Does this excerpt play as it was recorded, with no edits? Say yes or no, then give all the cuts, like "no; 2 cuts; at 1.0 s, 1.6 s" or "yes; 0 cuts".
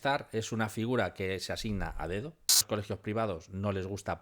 no; 1 cut; at 2.6 s